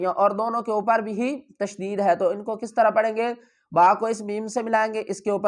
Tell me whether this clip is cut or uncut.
uncut